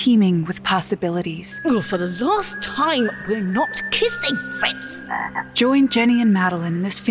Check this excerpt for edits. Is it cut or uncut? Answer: cut